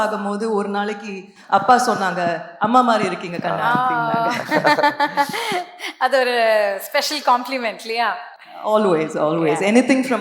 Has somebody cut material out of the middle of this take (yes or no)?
no